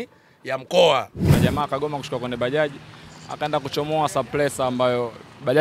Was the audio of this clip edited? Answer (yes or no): yes